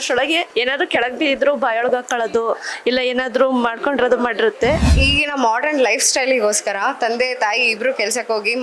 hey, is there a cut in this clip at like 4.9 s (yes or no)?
yes